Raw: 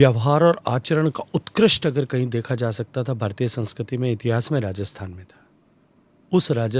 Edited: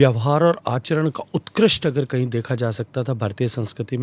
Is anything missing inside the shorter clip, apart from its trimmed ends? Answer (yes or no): no